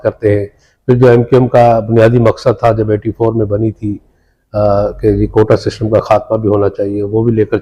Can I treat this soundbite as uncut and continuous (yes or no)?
yes